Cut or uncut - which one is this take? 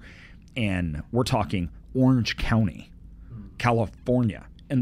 uncut